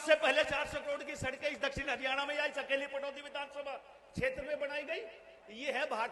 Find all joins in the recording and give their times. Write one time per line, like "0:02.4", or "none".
none